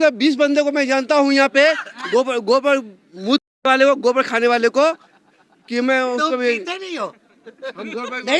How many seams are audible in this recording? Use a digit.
0